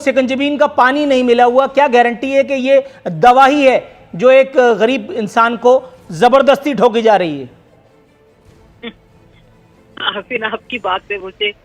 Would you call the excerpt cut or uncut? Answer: uncut